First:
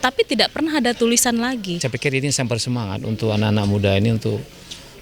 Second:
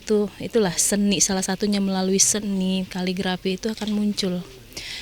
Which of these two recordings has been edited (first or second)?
first